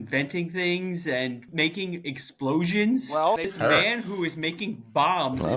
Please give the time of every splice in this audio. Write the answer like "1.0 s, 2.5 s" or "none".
1.5 s, 3.5 s